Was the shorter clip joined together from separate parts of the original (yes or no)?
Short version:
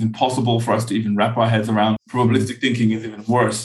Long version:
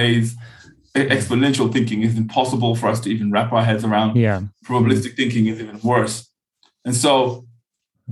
yes